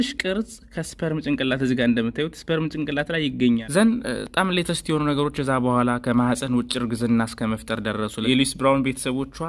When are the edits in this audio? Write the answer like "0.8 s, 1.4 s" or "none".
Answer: 3.6 s, 8.2 s